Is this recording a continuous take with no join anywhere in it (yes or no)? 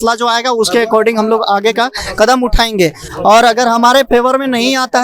yes